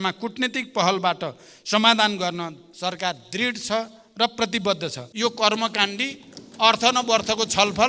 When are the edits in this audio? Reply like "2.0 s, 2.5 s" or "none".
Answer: 5.0 s